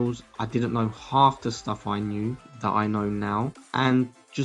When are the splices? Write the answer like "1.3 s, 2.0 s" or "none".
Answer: 2.5 s, 3.6 s